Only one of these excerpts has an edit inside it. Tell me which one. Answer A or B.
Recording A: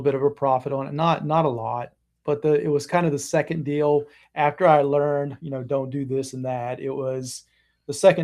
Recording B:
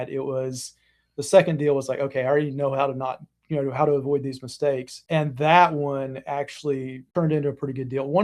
B